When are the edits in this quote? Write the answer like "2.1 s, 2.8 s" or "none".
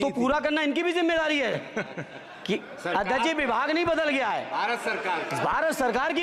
none